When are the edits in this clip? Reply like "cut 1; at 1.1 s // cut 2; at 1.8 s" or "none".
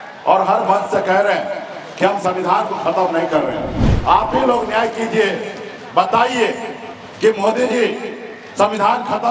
none